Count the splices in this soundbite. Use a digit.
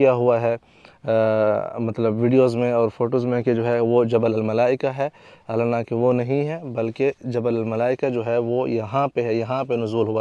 0